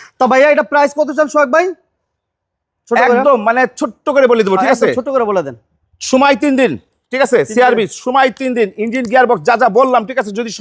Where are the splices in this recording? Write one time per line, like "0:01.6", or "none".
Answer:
none